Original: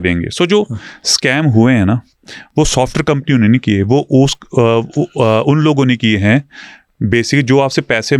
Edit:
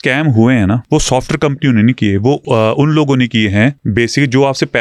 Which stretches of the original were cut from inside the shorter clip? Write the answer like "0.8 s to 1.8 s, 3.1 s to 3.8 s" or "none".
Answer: 2.0 s to 2.5 s, 4.1 s to 5.1 s, 6.5 s to 7.0 s